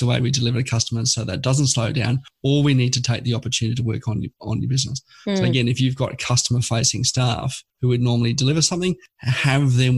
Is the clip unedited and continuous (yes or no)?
yes